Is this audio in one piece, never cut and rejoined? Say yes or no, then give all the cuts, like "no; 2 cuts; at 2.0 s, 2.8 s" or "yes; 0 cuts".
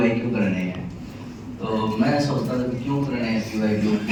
yes; 0 cuts